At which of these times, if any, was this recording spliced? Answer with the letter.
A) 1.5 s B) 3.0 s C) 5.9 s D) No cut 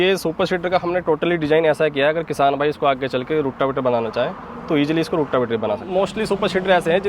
C